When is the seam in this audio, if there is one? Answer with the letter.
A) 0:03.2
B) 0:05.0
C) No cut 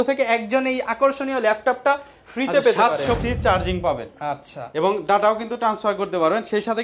A